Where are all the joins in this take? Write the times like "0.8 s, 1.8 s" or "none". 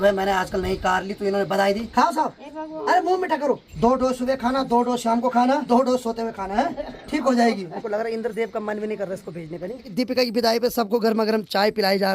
1.8 s, 3.7 s, 5.6 s, 7.8 s, 9.9 s